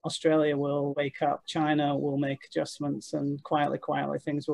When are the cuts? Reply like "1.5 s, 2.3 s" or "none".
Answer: none

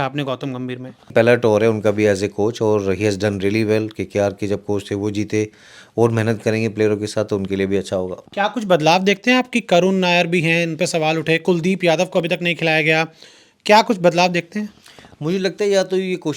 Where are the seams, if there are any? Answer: 1.1 s, 8.2 s

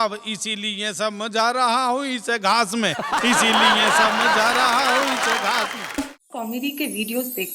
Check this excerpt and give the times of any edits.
6.0 s

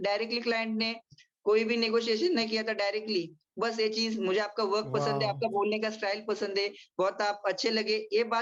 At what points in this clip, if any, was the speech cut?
none

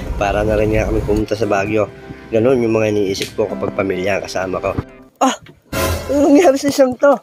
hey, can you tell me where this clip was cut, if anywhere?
5.0 s

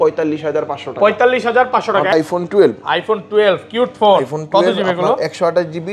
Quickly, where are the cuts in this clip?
2.1 s

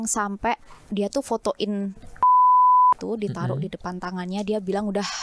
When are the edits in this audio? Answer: none

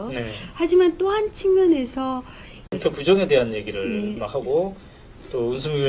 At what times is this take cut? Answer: none

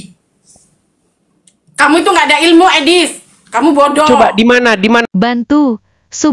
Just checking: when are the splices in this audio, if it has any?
5.1 s

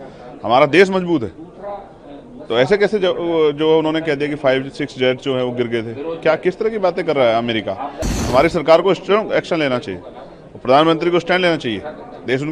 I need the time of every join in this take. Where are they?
8.2 s

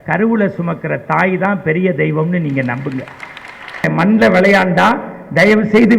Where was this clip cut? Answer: 3.9 s

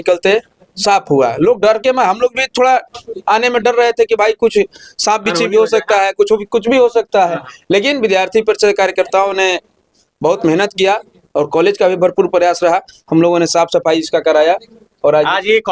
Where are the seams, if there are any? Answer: none

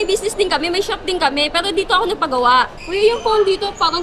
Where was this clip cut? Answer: 2.8 s

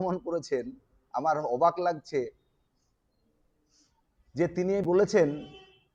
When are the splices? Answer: none

